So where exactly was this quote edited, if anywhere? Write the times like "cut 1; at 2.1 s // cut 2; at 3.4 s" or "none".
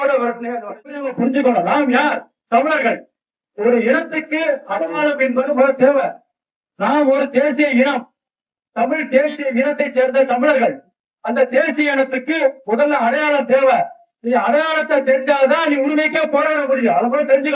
cut 1; at 1.1 s